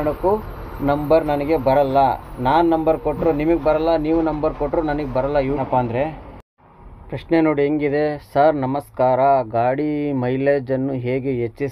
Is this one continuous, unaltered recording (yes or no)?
no